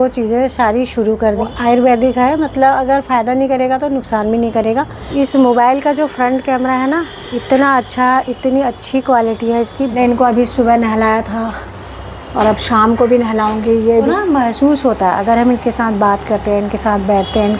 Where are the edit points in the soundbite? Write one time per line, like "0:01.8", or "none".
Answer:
0:01.5
0:05.0
0:10.0
0:14.1